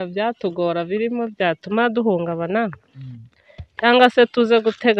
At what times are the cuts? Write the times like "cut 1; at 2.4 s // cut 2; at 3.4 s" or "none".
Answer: none